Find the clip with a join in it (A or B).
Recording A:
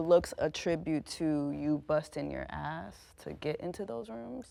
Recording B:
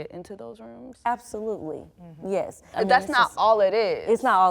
B